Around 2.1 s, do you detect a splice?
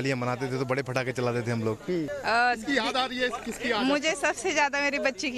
yes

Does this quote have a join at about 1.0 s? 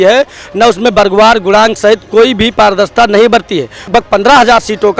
no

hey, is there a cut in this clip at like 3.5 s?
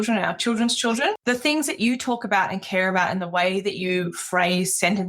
no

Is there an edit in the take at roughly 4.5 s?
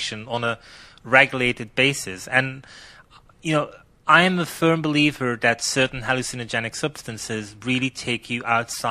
yes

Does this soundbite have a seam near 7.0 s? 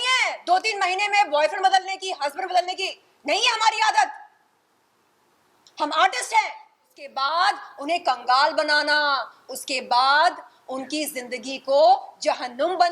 yes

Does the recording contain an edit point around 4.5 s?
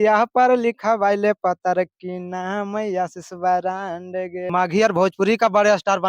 yes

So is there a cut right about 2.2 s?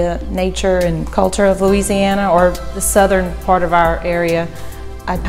no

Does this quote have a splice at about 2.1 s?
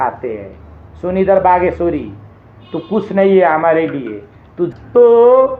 no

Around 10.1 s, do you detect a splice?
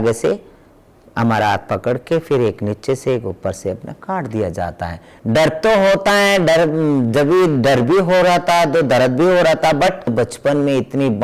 yes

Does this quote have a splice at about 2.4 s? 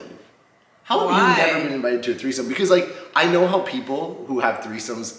no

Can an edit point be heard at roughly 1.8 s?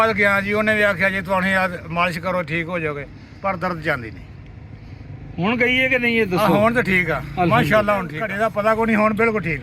no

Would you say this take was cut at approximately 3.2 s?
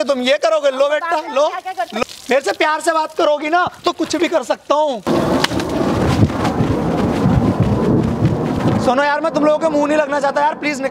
no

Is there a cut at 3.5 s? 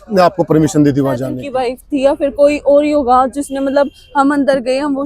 no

